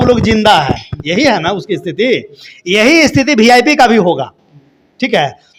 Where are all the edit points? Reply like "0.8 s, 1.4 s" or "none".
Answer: none

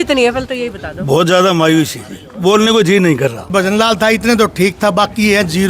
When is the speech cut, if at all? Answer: 3.5 s

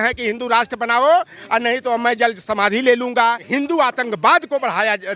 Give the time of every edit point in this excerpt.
3.4 s

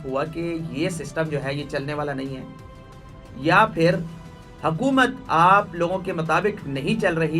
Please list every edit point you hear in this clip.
none

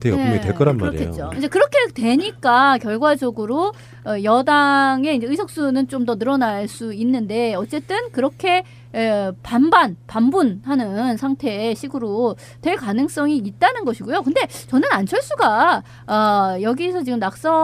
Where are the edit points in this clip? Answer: 10.5 s

